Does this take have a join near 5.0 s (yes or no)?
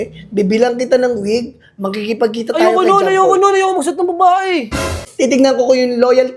yes